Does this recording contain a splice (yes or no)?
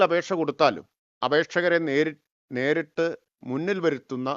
no